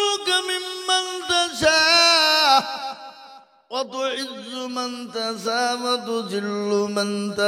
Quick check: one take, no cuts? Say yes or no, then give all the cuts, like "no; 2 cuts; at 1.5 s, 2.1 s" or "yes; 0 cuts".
yes; 0 cuts